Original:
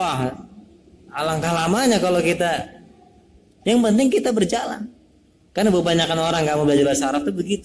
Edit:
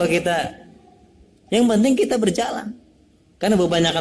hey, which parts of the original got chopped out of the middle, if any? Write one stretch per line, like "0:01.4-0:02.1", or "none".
none

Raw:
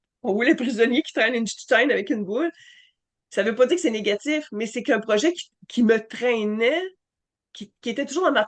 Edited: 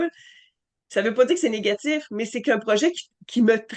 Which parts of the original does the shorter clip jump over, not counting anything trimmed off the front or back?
none

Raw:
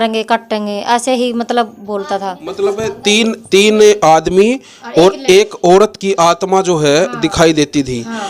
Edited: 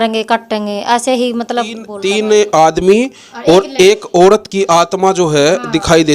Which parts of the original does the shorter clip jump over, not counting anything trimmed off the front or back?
0:01.9-0:03.4

